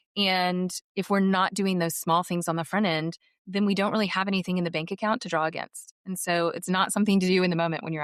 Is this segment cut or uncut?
uncut